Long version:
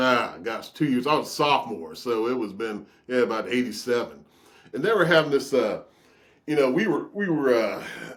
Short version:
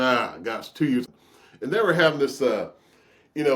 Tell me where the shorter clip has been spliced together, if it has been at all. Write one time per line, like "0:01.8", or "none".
0:01.0